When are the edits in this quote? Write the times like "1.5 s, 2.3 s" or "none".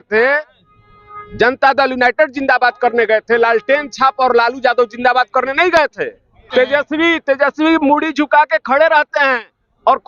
6.4 s